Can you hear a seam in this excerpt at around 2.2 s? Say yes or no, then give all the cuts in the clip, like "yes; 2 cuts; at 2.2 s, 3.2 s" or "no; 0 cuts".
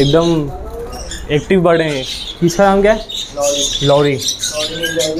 yes; 1 cut; at 2.2 s